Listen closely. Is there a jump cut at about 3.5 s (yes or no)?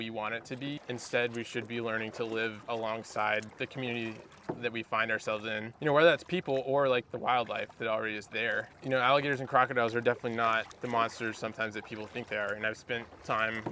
yes